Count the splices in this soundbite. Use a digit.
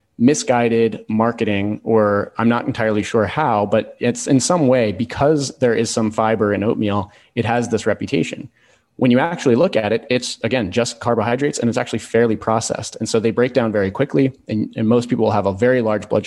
0